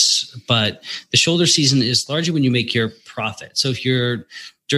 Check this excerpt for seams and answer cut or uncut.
uncut